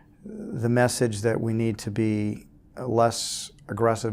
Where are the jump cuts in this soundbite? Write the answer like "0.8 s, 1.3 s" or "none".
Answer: 2.8 s